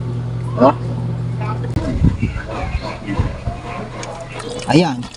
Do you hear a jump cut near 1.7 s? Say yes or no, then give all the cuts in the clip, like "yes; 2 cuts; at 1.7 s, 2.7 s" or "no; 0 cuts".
yes; 1 cut; at 1.7 s